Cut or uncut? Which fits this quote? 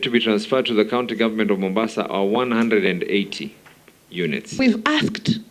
cut